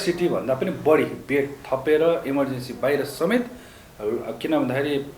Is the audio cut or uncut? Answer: uncut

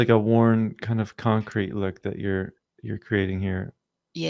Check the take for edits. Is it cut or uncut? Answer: uncut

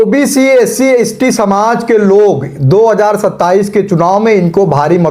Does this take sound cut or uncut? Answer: uncut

